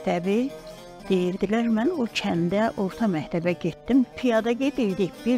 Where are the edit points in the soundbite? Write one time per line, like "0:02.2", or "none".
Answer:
0:04.1

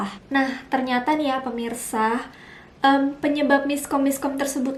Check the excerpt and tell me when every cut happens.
none

